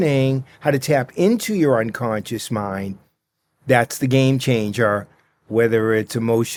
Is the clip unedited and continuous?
yes; 0 cuts

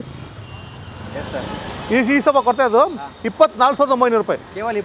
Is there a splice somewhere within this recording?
no; 0 cuts

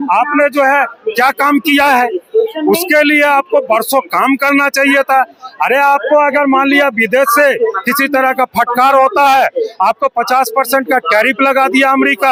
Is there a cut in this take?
no; 0 cuts

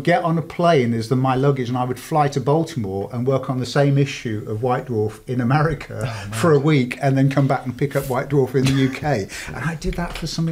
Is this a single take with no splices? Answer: yes; 0 cuts

